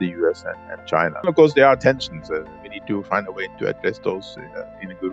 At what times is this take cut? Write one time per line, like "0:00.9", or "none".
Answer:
none